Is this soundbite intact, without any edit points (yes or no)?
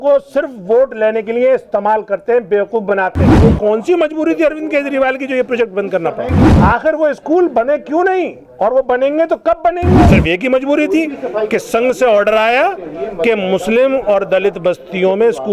no